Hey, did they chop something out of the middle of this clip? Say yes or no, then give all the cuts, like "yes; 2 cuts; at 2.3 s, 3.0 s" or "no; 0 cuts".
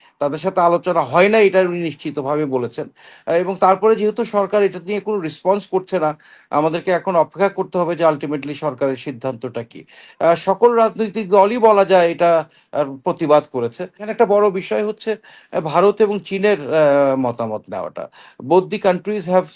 yes; 1 cut; at 14.0 s